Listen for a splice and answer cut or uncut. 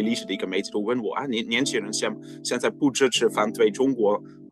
uncut